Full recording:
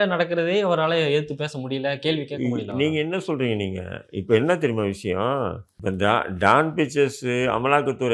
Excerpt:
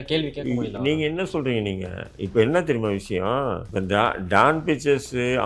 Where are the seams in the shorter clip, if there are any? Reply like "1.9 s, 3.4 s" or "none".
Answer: 3.6 s